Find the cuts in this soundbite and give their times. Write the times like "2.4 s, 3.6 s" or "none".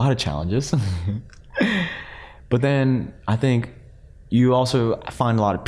none